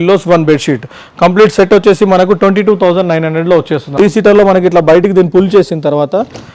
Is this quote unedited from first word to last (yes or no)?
no